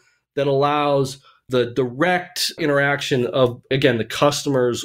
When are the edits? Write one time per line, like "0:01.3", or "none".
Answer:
0:01.4
0:02.6
0:03.7